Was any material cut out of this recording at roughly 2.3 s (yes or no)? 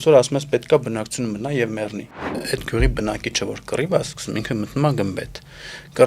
yes